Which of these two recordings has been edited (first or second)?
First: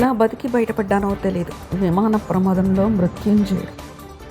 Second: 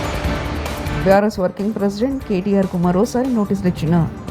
second